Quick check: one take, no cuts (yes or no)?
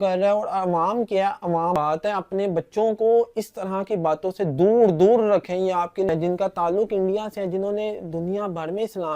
no